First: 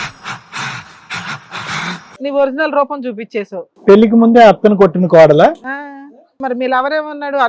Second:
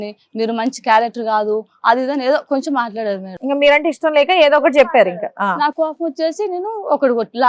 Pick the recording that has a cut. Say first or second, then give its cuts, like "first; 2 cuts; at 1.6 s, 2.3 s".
first; 3 cuts; at 2.2 s, 3.7 s, 6.4 s